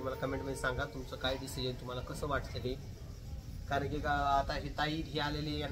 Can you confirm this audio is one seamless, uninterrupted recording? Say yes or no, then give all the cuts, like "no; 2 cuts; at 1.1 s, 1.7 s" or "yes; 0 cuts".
yes; 0 cuts